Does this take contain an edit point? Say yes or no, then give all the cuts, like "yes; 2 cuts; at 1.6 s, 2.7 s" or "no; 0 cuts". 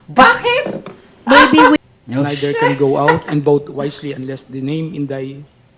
yes; 1 cut; at 1.8 s